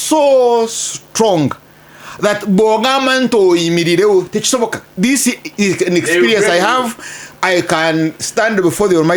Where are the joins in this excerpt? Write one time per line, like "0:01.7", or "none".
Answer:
none